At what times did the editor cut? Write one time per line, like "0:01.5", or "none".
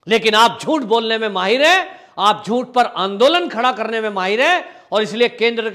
none